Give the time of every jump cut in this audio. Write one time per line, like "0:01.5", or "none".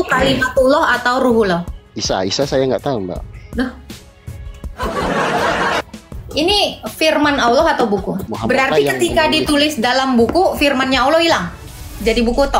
0:05.8
0:08.3